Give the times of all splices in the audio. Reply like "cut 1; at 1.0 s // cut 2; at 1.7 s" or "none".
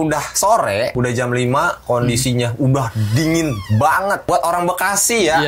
cut 1; at 0.9 s // cut 2; at 4.3 s